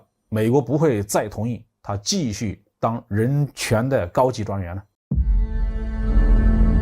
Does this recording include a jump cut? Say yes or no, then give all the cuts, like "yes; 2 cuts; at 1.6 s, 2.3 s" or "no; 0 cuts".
yes; 1 cut; at 4.9 s